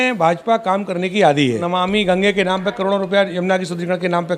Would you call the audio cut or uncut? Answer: cut